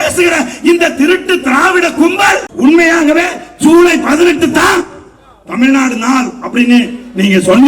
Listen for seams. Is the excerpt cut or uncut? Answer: cut